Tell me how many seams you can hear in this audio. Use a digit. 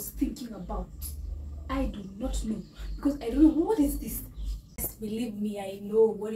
1